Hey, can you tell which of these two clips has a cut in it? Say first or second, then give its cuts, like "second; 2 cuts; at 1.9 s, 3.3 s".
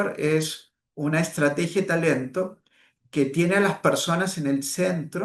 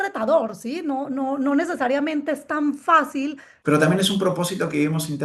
second; 1 cut; at 3.5 s